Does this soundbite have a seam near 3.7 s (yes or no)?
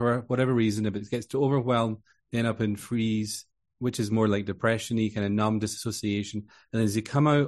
yes